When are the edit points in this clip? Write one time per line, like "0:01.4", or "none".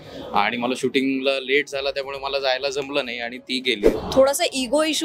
0:03.9